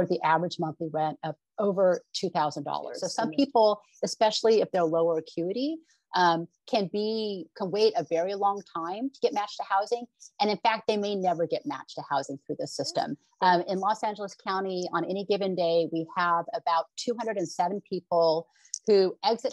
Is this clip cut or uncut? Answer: cut